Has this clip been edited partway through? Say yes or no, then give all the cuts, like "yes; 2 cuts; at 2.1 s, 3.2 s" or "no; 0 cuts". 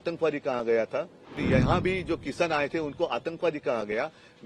yes; 1 cut; at 1.4 s